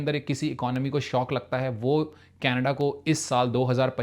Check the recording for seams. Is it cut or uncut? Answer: uncut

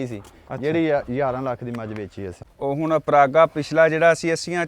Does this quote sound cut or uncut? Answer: cut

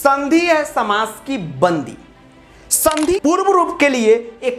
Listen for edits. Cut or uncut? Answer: cut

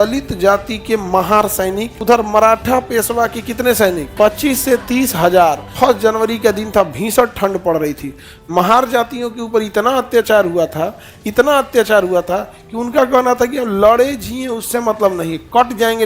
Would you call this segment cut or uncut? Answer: cut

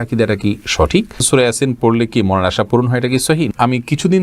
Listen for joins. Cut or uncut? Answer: cut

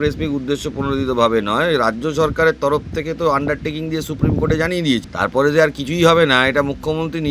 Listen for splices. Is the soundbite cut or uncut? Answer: cut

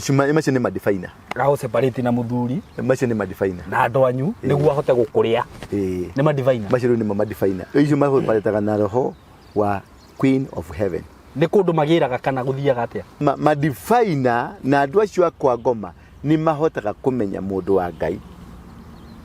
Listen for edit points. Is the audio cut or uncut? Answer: cut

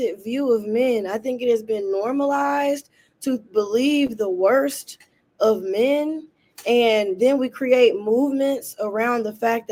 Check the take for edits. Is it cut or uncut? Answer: uncut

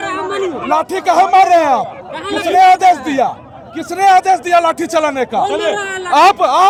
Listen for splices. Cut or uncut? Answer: uncut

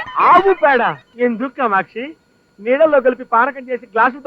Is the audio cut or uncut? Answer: cut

